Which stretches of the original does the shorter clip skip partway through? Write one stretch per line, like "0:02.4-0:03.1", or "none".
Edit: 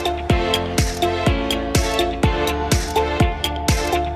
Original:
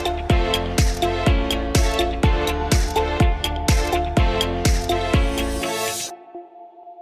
none

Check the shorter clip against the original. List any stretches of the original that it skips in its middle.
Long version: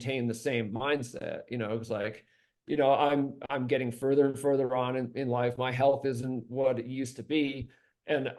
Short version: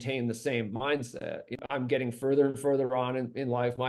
0:01.6-0:03.4

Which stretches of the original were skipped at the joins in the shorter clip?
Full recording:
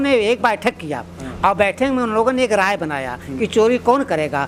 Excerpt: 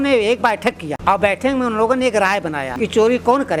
0:00.9-0:01.3
0:03.0-0:03.3

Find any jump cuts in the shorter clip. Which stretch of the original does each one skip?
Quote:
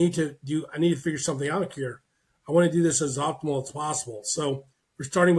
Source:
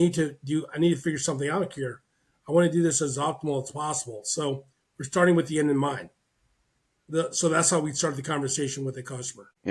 none

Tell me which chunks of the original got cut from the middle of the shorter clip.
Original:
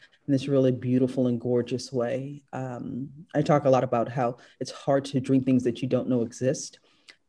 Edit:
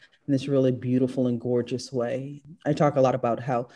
0:02.4-0:03.1

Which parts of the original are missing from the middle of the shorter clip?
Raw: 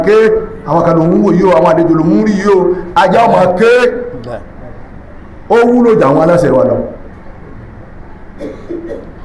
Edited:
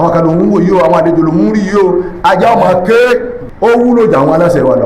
0:04.1-0:05.3

